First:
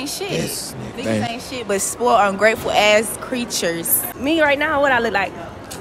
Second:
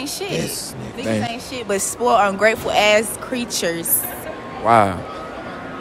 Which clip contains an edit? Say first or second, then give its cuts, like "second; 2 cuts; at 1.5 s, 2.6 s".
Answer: first; 1 cut; at 4.1 s